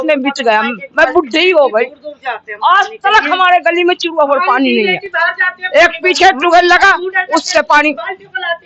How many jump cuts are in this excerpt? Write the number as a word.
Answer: zero